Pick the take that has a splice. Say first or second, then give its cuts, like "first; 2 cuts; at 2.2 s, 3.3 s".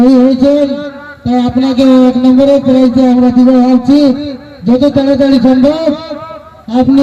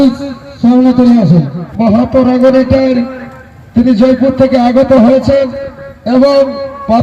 second; 1 cut; at 1.6 s